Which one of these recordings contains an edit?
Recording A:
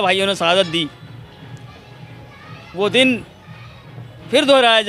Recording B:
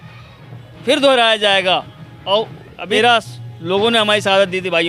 B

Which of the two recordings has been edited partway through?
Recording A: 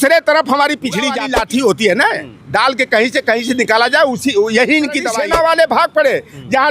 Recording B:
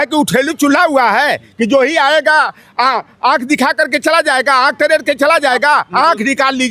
A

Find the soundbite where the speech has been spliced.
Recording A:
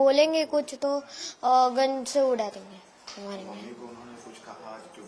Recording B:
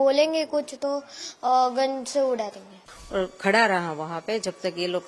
B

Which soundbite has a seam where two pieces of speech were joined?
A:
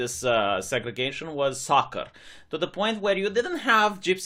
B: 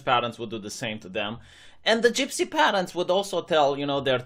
B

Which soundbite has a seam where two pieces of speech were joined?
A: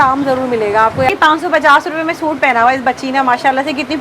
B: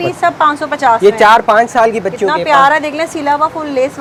A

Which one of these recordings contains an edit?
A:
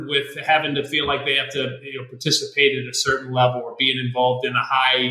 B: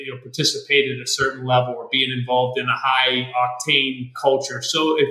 B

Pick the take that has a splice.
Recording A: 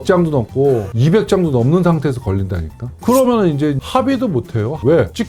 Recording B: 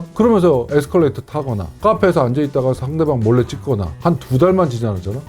B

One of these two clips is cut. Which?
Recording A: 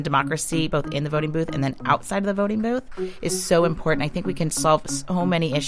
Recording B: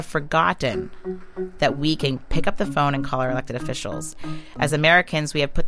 B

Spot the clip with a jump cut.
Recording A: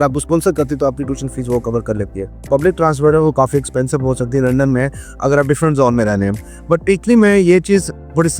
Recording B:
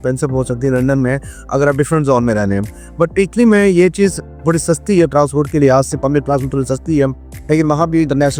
A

